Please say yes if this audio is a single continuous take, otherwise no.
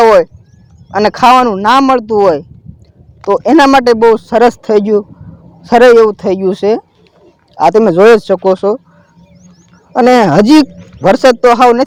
yes